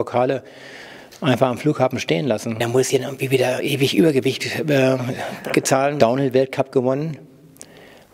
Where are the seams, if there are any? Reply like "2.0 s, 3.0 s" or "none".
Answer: 2.6 s, 6.0 s